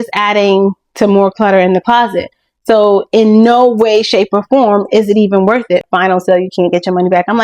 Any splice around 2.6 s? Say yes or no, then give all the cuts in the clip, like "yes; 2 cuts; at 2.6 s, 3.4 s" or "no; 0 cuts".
no; 1 cut; at 5.9 s